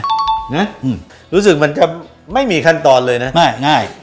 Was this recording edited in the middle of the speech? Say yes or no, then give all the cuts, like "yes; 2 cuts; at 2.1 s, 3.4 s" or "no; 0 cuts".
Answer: yes; 1 cut; at 1.1 s